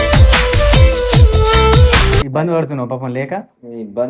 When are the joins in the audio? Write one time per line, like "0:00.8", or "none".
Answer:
0:02.3